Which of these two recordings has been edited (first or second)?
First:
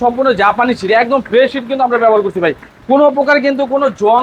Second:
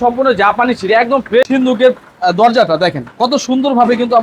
second